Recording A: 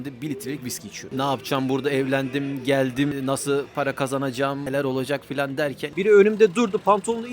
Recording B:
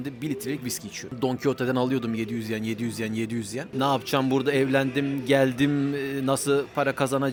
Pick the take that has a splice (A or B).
A